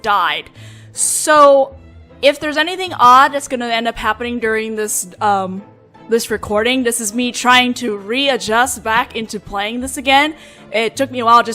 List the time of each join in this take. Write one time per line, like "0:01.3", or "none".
0:08.0